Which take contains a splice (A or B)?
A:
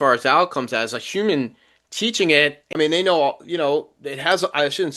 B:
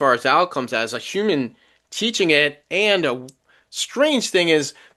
A